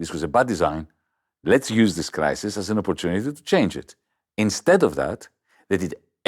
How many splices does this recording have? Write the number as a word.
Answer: zero